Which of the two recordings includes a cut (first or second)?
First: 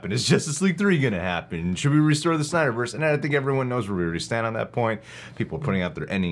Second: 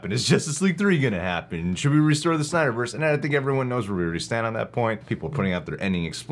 second